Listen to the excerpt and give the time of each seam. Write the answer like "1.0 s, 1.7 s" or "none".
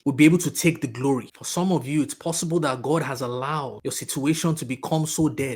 3.8 s